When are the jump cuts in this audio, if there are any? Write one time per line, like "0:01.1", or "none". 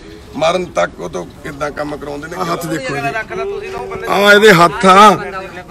0:02.3